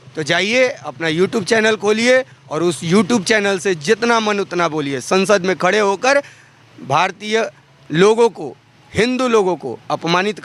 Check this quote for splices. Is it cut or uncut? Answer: uncut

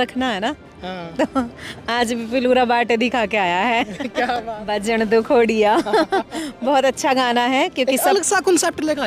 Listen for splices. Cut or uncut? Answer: cut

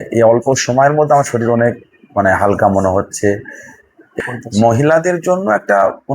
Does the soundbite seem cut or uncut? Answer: cut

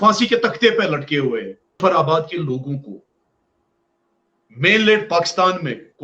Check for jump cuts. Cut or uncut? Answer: cut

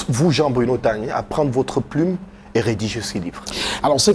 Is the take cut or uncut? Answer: uncut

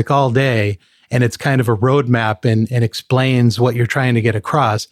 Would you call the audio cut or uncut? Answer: uncut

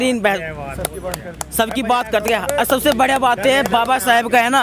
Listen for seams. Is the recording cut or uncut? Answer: uncut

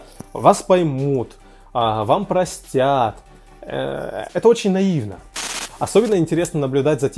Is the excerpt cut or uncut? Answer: uncut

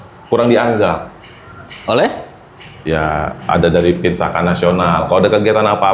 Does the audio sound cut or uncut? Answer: uncut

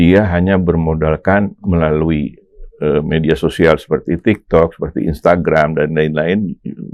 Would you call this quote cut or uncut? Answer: uncut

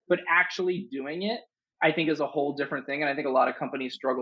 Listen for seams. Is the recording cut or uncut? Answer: uncut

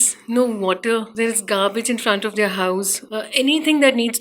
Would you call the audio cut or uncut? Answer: cut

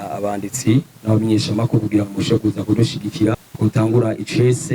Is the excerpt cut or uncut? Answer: cut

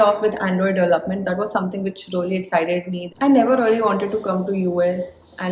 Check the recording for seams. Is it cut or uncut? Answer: cut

